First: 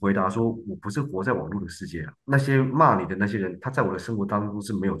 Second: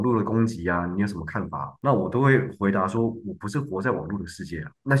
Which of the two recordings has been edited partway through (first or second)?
second